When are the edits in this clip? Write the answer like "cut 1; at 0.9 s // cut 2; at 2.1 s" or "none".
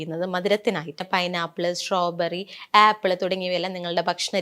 cut 1; at 1.0 s